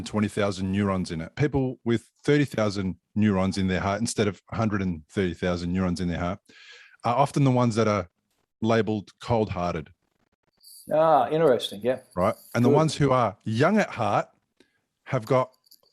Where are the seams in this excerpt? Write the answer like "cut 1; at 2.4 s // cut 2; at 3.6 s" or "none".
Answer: cut 1; at 1.3 s